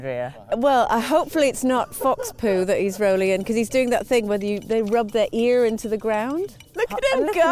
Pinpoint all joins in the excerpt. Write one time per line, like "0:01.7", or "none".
0:06.6